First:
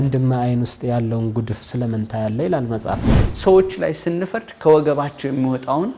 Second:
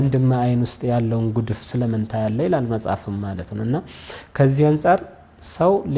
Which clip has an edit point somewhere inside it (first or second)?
first